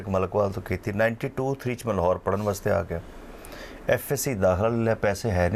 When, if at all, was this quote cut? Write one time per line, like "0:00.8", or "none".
none